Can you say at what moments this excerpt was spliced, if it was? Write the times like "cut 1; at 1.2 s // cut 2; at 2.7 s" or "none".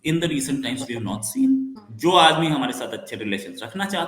cut 1; at 1.8 s